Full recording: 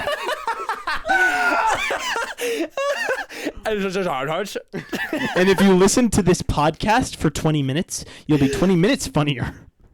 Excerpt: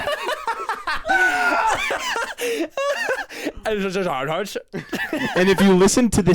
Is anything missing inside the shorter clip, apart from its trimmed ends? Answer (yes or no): no